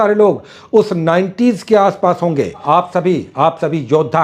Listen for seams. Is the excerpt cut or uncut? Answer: cut